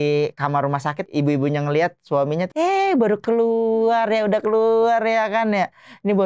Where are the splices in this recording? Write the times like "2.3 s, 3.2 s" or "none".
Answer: 1.0 s, 2.5 s

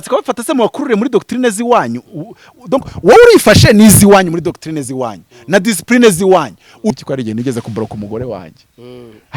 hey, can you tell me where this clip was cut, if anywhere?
6.9 s

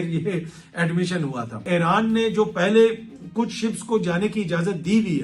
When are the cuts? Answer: 1.6 s

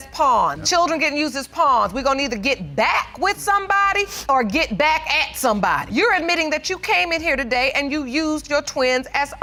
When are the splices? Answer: none

